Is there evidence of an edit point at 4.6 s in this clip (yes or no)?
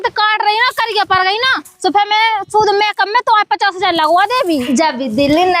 yes